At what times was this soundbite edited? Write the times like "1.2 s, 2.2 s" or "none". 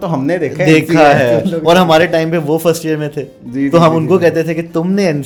none